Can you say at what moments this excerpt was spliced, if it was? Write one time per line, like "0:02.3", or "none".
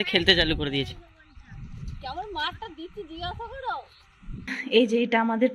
0:04.5